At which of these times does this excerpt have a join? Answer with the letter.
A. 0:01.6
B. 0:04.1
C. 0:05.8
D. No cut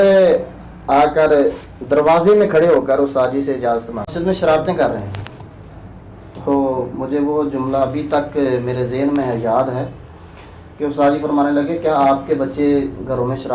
B